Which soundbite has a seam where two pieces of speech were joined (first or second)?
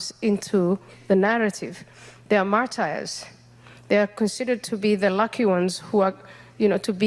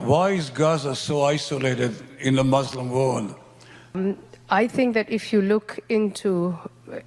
second